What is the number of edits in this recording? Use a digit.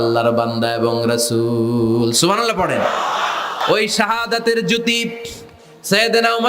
1